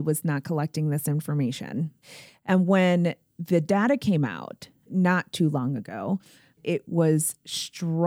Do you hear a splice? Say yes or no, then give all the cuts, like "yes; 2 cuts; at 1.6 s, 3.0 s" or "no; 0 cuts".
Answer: yes; 3 cuts; at 2.1 s, 4.9 s, 6.6 s